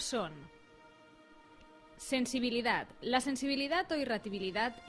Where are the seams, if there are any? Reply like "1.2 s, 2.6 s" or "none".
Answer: 3.8 s